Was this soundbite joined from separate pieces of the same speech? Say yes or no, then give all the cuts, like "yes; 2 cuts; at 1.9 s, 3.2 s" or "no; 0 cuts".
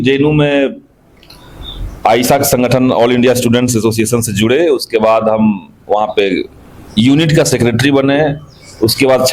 no; 0 cuts